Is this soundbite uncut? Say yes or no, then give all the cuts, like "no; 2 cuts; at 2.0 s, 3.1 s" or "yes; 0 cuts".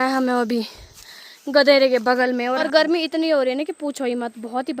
no; 1 cut; at 2.6 s